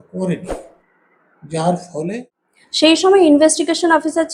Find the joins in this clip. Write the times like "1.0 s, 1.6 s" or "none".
2.2 s